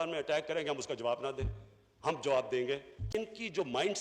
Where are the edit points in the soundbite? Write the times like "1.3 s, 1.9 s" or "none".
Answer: 2.9 s